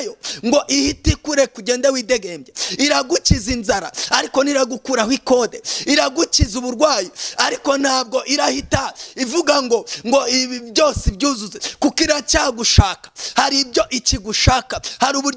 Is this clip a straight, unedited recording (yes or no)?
yes